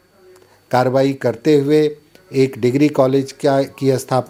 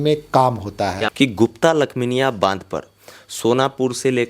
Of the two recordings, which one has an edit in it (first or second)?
second